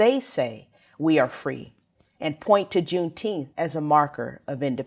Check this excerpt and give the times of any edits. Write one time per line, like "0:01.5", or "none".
0:03.5